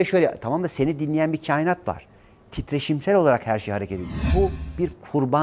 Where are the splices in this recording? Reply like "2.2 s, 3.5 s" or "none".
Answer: 4.3 s